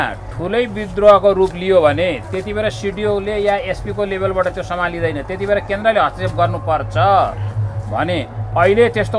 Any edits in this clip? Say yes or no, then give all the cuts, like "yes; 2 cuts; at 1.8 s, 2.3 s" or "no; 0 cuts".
no; 0 cuts